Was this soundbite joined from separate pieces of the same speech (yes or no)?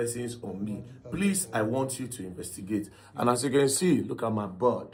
no